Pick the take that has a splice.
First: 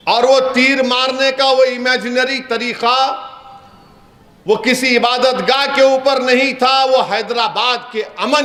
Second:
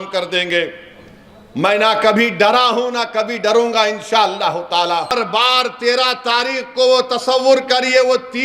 second; 1 cut; at 5.1 s

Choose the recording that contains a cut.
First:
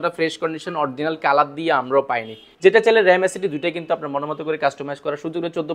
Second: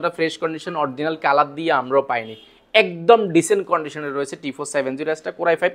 first; 1 cut; at 2.4 s

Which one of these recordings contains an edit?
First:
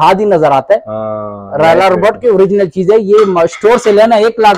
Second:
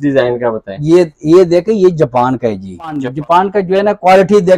second; 1 cut; at 3.1 s

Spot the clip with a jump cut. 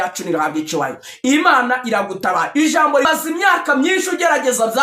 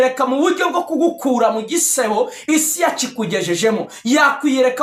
first; 1 cut; at 3.1 s

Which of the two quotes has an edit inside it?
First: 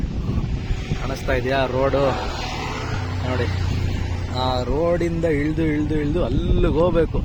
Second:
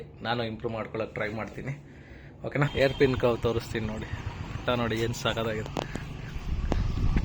second; 1 cut; at 2.7 s

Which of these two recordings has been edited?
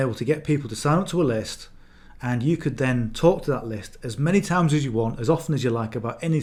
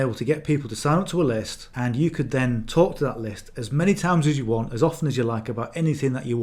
second; 1 cut; at 1.6 s

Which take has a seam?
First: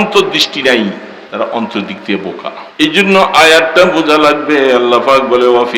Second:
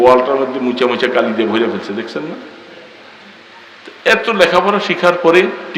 first; 2 cuts; at 1.2 s, 2.6 s

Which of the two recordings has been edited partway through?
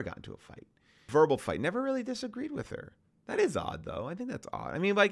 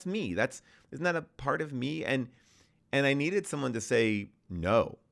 first; 1 cut; at 1.0 s

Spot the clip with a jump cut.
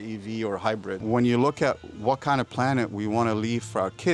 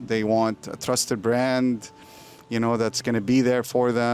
first; 1 cut; at 1.0 s

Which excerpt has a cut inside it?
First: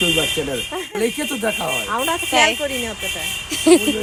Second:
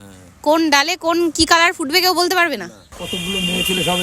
second; 1 cut; at 2.9 s

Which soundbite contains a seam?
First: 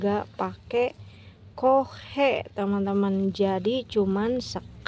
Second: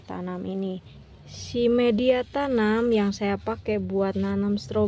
second; 1 cut; at 1.2 s

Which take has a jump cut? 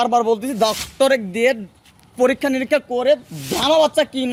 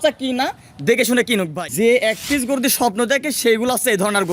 second; 1 cut; at 1.6 s

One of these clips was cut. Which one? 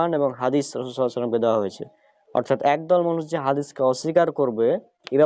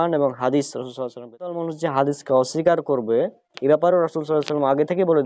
second; 1 cut; at 1.5 s

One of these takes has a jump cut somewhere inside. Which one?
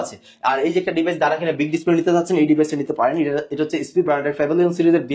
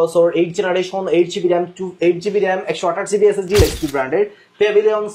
second; 1 cut; at 3.6 s

